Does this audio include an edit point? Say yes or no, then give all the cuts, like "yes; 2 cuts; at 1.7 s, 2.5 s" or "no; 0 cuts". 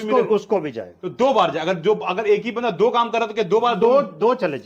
no; 0 cuts